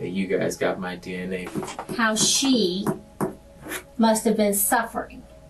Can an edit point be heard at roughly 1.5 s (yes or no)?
yes